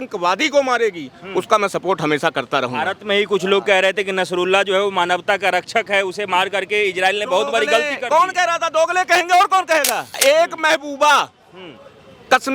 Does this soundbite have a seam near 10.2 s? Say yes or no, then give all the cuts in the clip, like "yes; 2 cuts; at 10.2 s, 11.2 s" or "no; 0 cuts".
yes; 1 cut; at 10.2 s